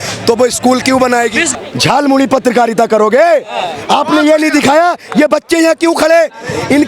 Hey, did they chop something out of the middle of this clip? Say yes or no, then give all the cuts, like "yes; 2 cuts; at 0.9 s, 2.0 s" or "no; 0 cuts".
yes; 1 cut; at 1.5 s